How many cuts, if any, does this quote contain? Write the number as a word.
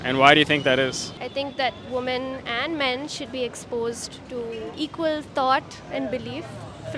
one